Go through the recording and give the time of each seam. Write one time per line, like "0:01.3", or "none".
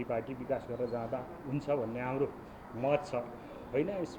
none